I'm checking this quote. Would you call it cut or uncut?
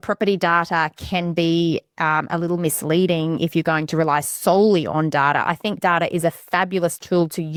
uncut